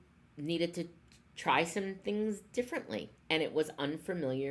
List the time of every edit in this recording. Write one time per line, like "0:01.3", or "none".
0:03.1